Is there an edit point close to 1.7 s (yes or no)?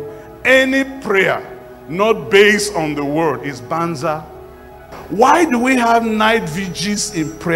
no